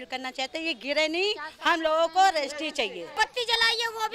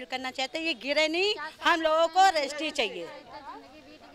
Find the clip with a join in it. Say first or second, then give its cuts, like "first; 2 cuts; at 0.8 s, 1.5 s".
first; 1 cut; at 3.1 s